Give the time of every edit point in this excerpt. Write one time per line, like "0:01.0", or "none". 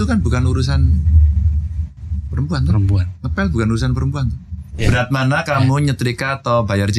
0:04.8